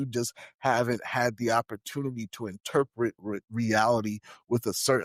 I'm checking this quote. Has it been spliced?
no; 0 cuts

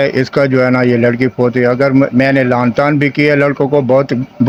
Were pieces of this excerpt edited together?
no; 0 cuts

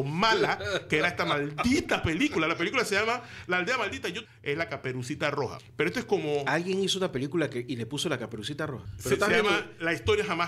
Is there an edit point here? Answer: yes; 3 cuts; at 4.2 s, 5.6 s, 8.9 s

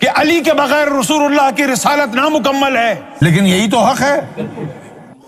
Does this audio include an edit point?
yes; 1 cut; at 3.1 s

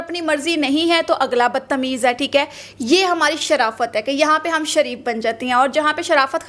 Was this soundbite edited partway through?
no; 0 cuts

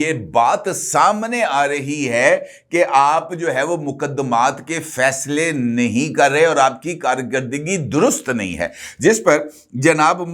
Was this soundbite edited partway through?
no; 0 cuts

